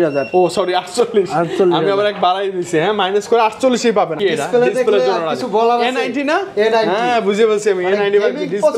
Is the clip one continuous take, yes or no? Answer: no